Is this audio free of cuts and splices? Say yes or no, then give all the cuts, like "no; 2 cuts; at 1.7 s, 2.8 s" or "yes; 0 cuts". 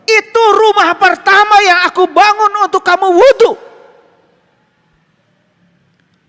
yes; 0 cuts